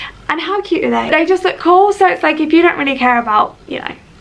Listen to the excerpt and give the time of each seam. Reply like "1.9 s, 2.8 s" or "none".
1.1 s